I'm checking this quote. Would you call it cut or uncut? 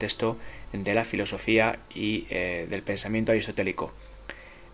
uncut